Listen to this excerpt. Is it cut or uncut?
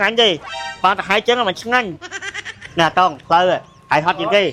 uncut